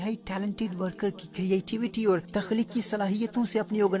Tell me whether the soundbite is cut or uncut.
cut